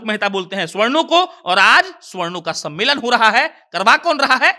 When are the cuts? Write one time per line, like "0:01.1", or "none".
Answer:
none